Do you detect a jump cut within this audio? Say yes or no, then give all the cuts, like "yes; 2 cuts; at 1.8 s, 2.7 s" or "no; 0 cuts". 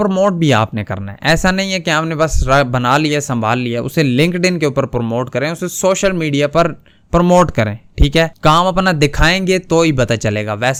no; 0 cuts